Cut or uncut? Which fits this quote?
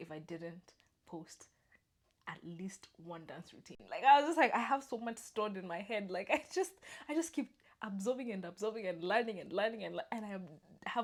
uncut